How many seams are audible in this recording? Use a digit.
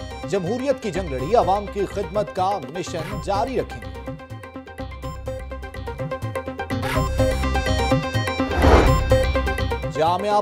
1